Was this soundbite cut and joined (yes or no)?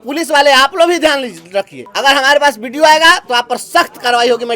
yes